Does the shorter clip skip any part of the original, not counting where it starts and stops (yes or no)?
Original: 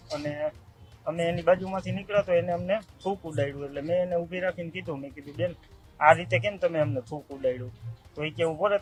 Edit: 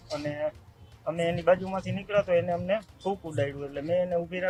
no